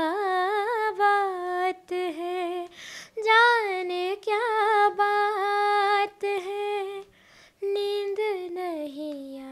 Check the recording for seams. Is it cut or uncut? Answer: uncut